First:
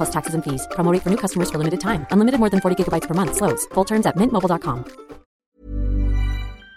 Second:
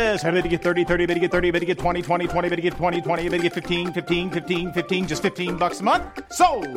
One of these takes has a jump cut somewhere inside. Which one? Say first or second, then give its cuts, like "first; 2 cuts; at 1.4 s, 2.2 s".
first; 1 cut; at 5.3 s